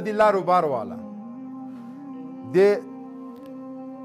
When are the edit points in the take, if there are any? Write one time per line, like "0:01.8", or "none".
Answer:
none